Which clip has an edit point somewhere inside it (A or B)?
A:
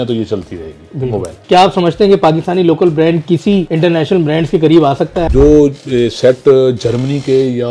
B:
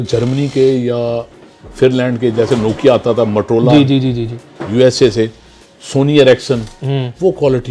A